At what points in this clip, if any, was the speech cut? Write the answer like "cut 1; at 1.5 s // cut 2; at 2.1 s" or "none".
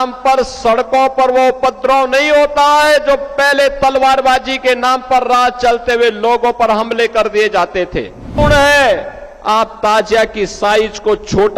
cut 1; at 8.3 s